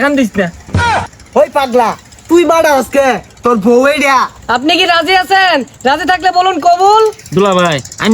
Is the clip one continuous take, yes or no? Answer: no